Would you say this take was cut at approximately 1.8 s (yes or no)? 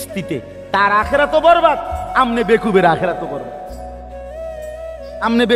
no